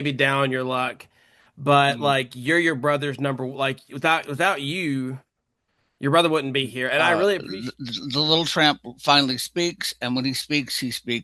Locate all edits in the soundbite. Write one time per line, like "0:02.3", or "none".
0:07.5

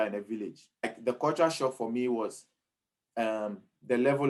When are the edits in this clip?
0:00.9

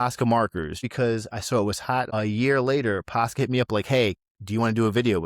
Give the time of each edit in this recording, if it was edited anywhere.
0:00.8
0:02.1

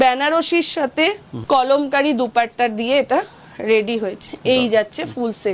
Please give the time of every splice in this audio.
0:01.3
0:04.3

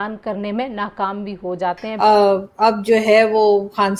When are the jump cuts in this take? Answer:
none

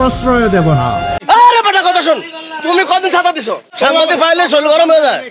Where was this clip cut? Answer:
0:01.2

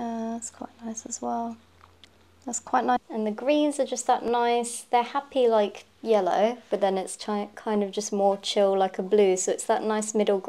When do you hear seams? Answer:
0:03.0

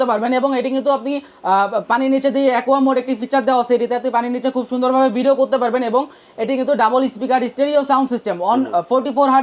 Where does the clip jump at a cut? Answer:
none

